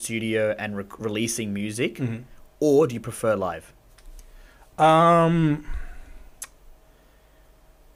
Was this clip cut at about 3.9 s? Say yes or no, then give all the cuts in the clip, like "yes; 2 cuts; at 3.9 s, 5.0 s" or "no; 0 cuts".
no; 0 cuts